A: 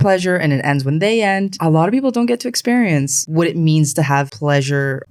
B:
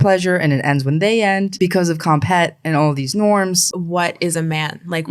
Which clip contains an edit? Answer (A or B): B